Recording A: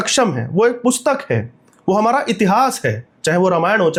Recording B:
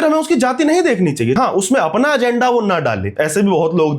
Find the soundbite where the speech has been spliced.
B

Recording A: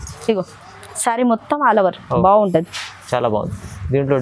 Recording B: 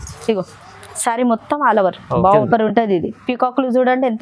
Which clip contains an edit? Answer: B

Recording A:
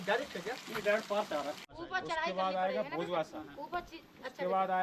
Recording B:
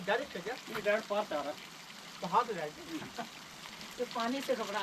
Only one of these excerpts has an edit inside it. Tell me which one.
A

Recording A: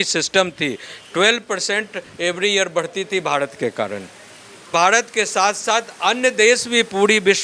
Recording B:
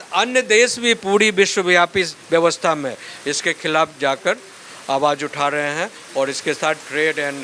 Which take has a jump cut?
A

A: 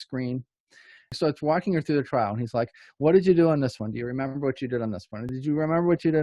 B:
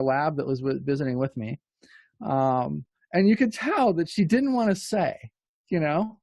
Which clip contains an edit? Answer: A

